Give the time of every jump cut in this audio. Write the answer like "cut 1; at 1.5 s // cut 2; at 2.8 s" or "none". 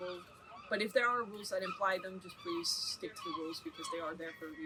none